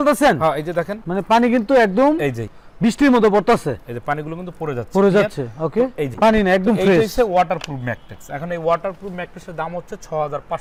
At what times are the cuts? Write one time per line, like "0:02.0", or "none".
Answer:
none